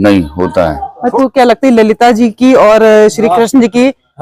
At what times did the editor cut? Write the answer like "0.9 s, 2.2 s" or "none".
1.1 s